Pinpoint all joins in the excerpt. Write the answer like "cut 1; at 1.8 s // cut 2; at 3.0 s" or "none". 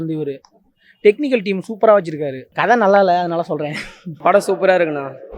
cut 1; at 2.4 s // cut 2; at 4.1 s

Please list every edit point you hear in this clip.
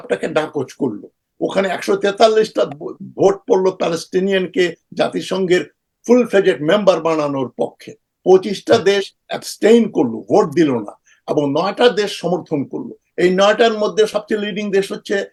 none

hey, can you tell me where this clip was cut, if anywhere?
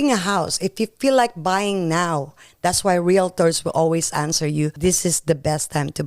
cut 1; at 4.7 s

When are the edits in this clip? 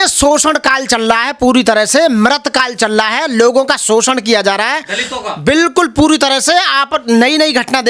none

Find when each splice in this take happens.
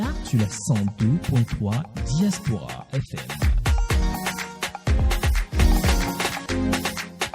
cut 1; at 6.4 s

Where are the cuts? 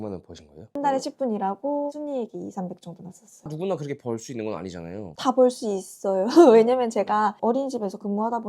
cut 1; at 0.7 s // cut 2; at 1.9 s // cut 3; at 3.3 s // cut 4; at 5.1 s

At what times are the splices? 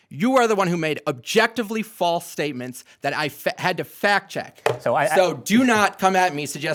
none

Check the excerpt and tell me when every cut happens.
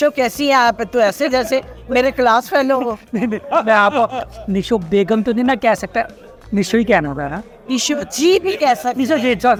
none

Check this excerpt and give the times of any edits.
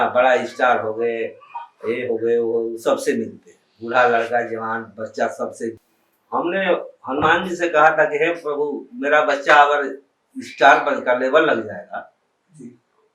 cut 1; at 5.9 s

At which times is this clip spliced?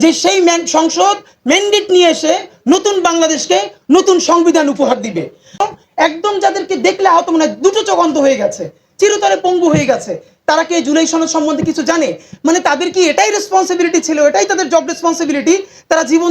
cut 1; at 5.6 s

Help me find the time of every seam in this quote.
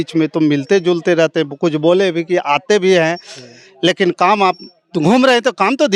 none

